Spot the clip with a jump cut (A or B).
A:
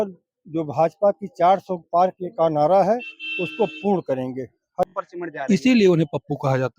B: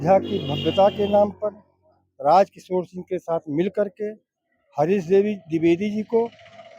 A